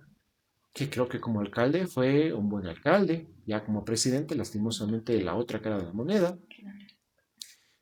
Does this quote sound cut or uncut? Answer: uncut